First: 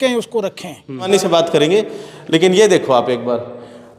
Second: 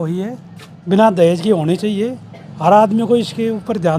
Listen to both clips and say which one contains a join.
first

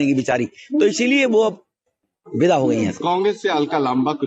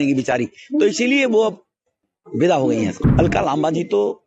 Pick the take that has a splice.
second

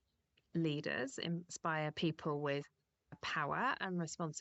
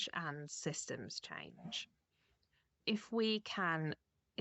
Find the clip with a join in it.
second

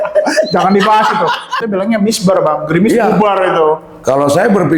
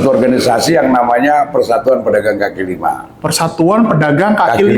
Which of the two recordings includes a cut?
first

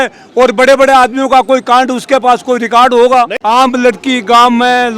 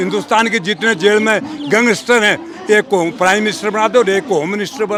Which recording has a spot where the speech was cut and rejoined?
first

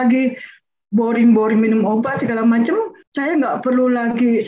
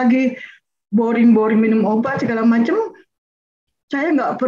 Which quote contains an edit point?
first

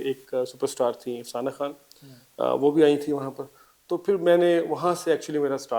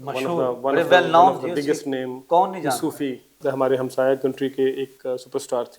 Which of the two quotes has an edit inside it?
second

